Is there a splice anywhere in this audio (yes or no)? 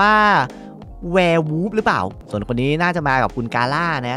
yes